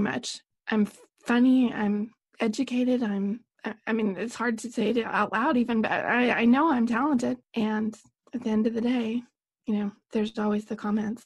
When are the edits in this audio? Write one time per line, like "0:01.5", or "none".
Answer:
0:07.4